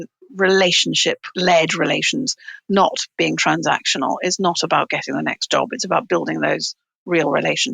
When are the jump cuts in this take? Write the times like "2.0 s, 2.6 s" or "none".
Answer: 1.3 s